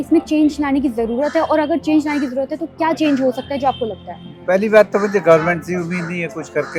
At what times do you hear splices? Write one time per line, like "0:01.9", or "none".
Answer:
none